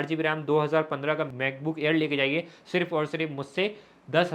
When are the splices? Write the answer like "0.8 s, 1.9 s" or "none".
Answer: none